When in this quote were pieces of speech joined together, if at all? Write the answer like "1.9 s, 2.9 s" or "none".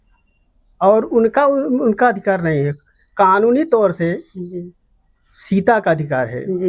none